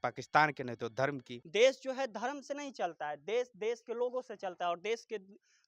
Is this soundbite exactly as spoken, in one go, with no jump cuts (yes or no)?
no